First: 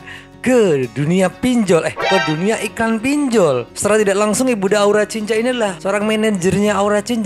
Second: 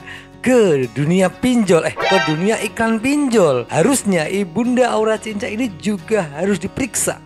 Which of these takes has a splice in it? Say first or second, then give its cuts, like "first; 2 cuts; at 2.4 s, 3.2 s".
second; 1 cut; at 3.7 s